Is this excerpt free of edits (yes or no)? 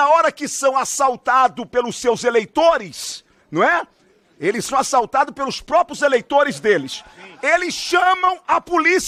yes